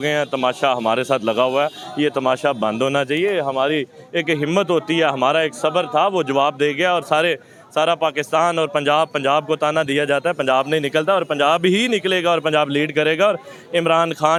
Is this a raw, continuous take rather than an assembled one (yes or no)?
yes